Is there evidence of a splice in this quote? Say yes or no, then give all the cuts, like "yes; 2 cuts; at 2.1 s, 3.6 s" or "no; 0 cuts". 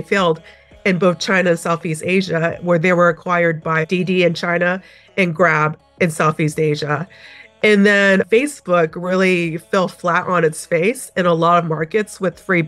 no; 0 cuts